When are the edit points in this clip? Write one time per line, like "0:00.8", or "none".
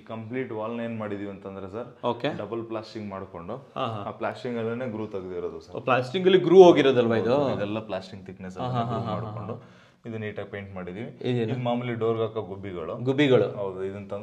none